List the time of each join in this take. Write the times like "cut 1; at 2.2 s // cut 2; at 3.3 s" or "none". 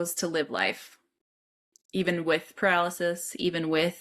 none